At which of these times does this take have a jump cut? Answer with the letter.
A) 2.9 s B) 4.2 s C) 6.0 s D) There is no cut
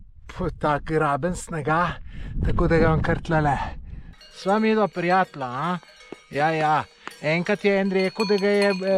B